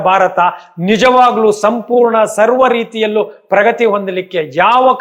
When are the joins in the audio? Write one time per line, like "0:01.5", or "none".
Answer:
none

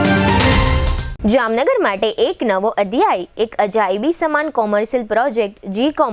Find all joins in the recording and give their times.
0:01.0

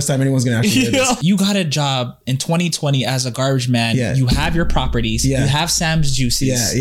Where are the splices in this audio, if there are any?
0:01.2

